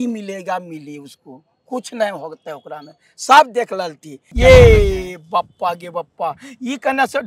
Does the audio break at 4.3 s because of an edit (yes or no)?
yes